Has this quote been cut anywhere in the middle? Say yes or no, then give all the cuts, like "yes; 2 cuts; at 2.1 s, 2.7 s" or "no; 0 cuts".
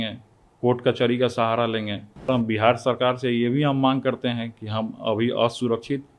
yes; 1 cut; at 2.3 s